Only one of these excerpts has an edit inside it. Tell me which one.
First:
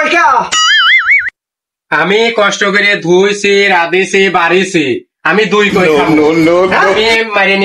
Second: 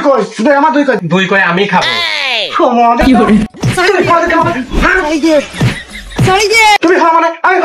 second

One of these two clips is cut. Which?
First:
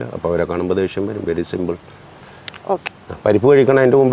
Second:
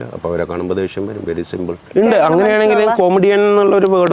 second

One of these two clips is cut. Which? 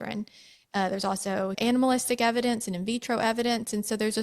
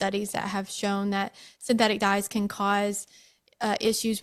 first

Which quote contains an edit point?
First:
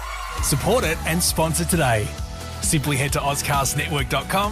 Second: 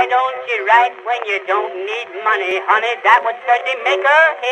second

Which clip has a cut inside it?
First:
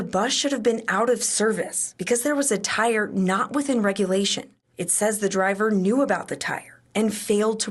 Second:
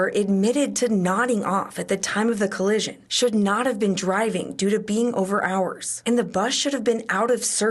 first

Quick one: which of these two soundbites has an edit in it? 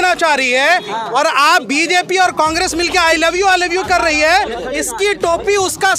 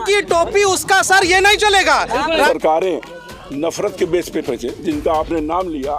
second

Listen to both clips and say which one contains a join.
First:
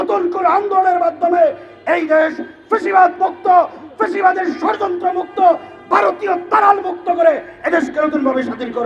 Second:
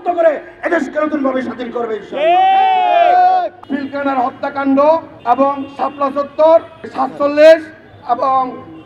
second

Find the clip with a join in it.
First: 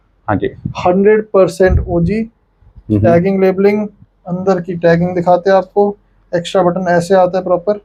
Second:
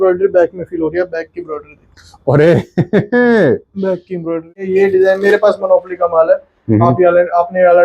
second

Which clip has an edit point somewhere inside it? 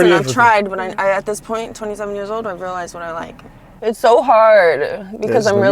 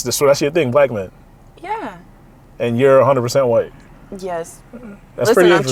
first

